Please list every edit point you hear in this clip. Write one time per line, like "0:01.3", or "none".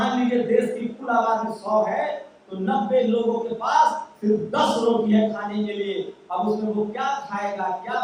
none